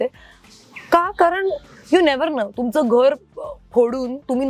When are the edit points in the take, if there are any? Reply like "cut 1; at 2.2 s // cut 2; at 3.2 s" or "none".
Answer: none